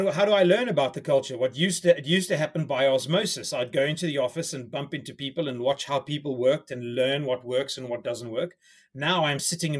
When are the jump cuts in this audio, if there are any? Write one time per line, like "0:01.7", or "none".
none